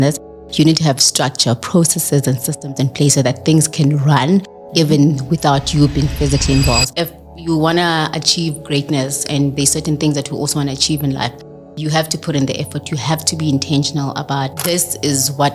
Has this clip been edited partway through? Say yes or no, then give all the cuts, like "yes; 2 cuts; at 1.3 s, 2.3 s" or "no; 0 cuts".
yes; 2 cuts; at 6.9 s, 14.6 s